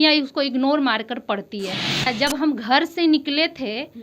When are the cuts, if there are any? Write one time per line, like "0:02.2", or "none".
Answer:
0:02.1